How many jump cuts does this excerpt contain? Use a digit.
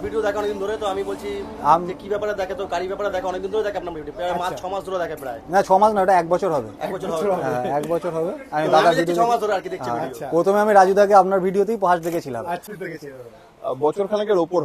1